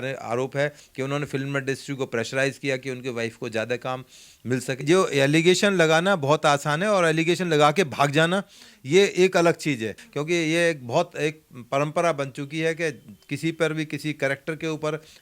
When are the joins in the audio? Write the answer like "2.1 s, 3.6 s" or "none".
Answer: 4.8 s, 10.0 s